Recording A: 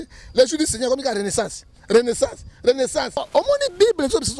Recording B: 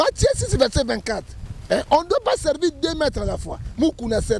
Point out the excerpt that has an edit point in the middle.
A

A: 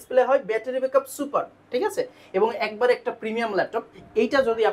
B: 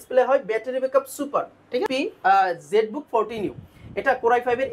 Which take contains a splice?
B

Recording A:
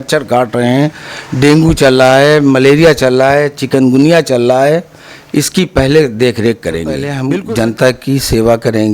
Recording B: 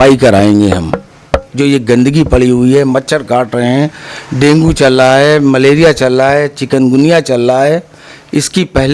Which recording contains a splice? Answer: A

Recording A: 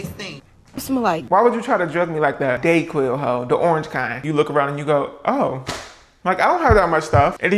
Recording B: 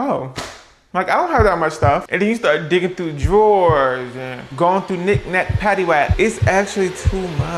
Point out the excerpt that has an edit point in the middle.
A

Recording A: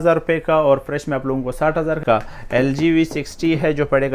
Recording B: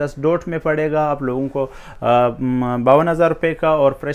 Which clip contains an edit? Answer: A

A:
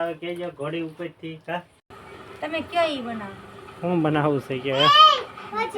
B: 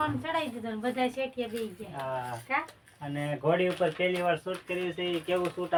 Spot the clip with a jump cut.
A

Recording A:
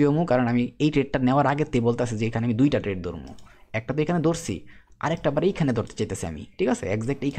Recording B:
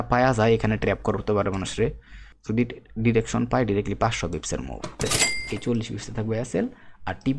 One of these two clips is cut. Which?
B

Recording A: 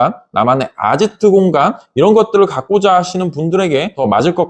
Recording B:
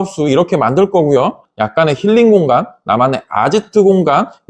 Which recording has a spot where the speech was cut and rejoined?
B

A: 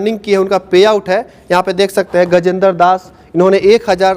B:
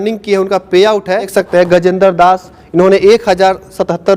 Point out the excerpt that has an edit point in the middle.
B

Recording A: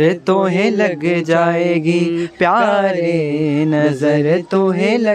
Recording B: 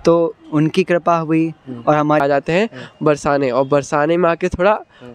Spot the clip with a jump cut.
B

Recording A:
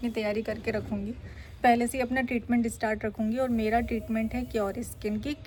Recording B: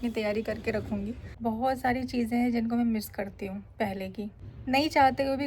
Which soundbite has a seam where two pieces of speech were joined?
B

